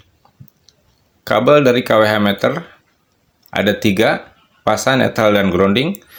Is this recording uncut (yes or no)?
yes